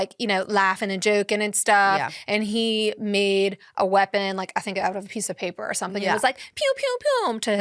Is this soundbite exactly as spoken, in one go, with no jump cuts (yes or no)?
yes